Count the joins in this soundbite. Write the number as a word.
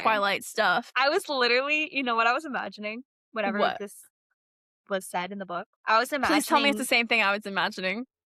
two